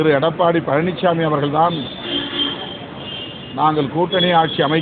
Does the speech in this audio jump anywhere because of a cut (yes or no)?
no